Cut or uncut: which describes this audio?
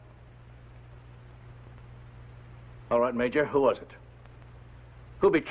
uncut